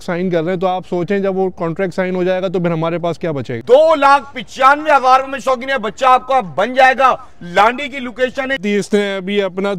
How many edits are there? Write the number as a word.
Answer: two